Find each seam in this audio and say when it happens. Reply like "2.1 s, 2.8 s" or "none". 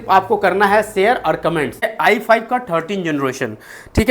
1.9 s